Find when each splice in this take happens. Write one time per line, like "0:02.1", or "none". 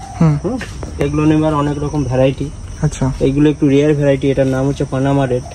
none